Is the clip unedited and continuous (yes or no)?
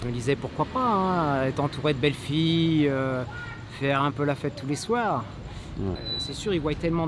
no